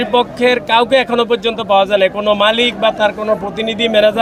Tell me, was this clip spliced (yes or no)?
no